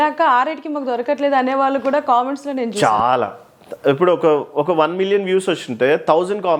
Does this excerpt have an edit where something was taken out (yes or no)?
no